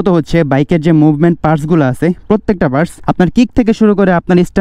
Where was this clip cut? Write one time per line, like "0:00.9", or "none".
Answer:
0:03.0